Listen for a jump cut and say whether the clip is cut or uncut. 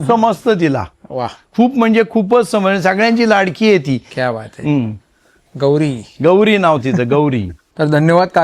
uncut